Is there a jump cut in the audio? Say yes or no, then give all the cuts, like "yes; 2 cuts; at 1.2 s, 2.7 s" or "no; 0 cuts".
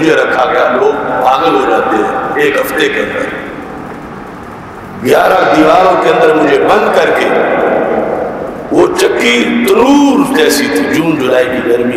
no; 0 cuts